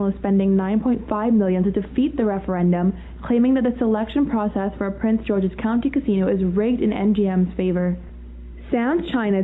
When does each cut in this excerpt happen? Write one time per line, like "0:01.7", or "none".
0:06.8

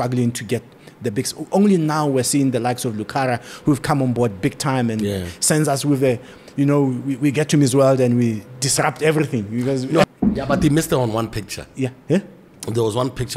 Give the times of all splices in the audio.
0:10.1

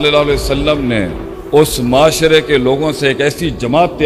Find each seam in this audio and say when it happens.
none

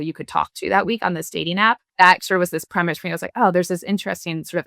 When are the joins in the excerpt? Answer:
0:01.9

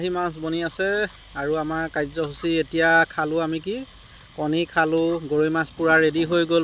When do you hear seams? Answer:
none

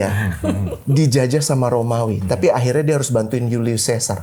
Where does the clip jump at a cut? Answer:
none

